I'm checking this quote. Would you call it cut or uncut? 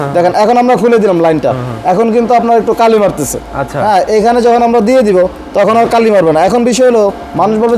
uncut